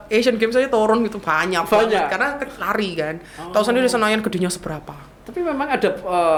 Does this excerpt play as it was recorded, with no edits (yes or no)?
yes